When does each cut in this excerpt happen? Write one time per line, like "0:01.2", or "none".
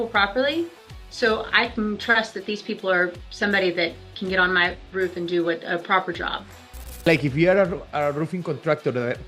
0:07.1